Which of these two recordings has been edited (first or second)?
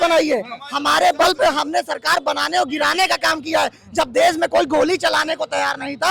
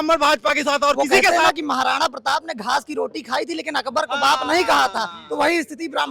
second